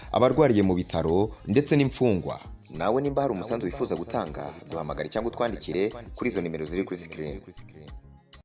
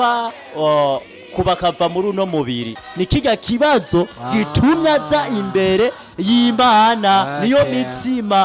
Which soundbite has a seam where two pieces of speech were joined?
second; 1 cut; at 2.8 s

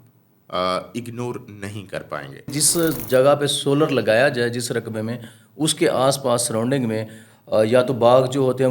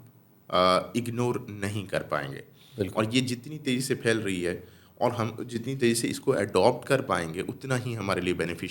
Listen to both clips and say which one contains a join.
first; 1 cut; at 2.6 s

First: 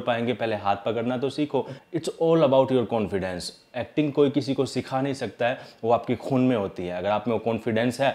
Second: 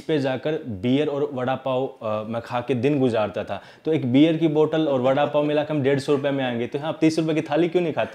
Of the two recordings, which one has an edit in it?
first; 1 cut; at 1.8 s

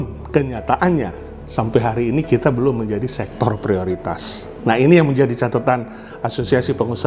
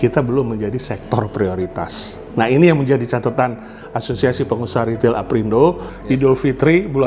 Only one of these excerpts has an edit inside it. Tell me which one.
second; 1 cut; at 5.9 s

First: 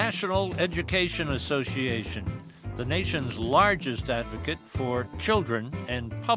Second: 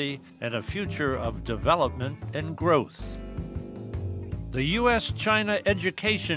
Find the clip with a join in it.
second; 2 cuts; at 3.2 s, 4.5 s

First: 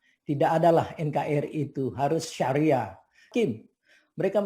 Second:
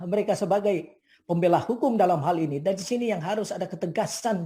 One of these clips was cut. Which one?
first; 1 cut; at 3.2 s

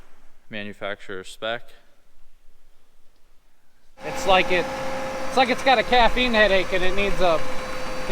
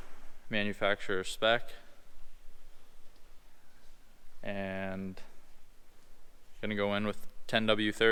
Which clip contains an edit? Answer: first; 1 cut; at 4.1 s

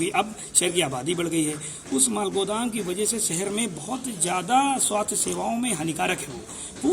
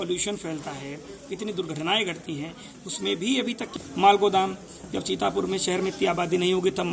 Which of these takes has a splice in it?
second; 1 cut; at 3.7 s

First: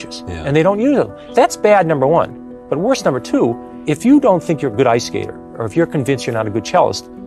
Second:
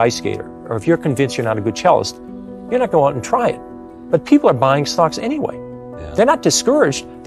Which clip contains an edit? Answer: first; 2 cuts; at 1.2 s, 3.7 s

